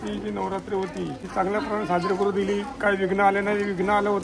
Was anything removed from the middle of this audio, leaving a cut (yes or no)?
yes